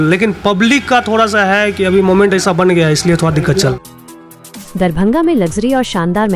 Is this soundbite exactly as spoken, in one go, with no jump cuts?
no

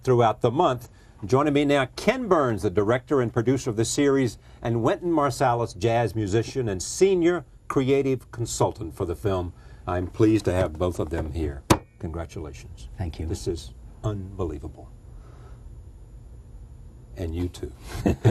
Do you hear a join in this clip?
yes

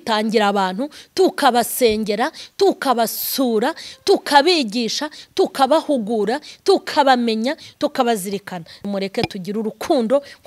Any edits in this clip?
yes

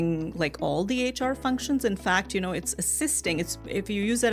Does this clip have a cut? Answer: no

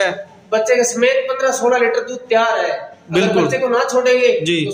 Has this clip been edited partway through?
no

